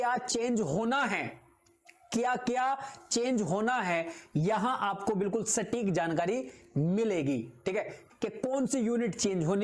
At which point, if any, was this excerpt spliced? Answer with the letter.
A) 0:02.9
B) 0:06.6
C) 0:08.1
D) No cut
C